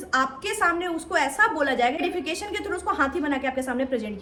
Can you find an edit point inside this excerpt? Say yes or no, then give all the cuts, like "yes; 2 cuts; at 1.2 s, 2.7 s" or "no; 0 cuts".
no; 0 cuts